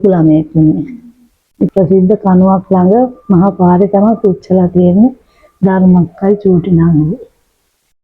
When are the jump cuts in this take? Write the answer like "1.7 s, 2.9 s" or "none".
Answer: 1.7 s